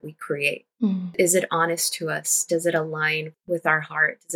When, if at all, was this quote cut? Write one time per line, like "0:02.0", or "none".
none

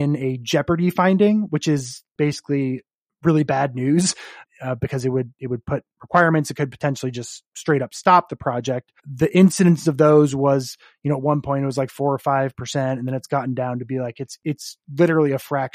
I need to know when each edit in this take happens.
0:04.3

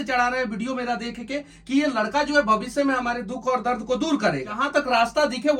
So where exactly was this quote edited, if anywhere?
0:04.6

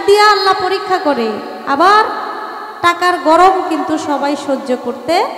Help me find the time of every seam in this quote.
none

